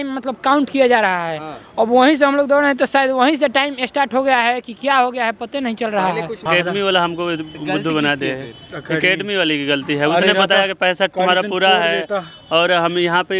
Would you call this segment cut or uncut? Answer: cut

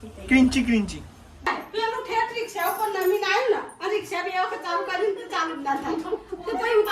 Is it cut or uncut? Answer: cut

